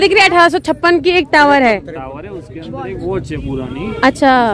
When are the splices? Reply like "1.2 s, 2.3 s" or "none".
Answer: none